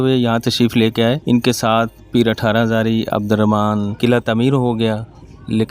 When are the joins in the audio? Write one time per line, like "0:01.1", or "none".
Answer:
0:01.2
0:03.9